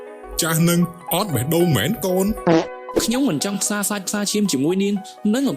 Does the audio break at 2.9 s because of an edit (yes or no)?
yes